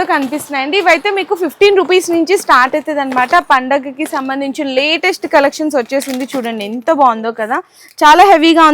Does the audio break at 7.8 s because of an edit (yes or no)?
no